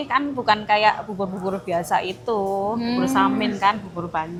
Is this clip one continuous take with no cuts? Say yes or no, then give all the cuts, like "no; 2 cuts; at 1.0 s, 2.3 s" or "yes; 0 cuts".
yes; 0 cuts